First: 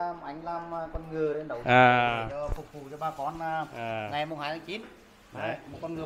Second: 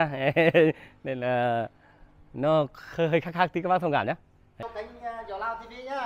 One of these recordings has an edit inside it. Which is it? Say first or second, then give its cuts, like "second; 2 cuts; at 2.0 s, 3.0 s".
second; 1 cut; at 4.7 s